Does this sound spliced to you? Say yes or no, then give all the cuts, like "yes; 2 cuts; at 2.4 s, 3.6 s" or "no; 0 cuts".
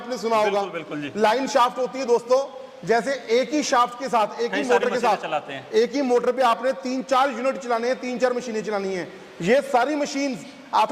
no; 0 cuts